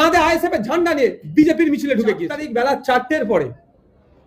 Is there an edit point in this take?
yes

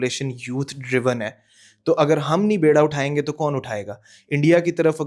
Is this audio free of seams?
yes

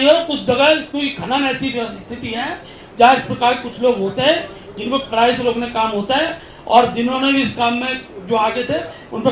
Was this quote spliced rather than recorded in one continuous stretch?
no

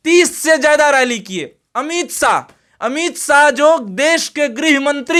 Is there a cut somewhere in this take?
no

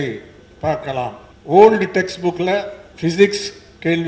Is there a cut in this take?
yes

